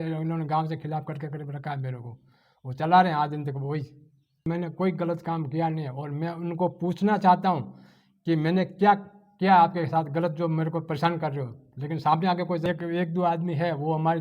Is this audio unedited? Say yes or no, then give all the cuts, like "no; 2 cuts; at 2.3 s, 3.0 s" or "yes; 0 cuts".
no; 2 cuts; at 4.5 s, 12.7 s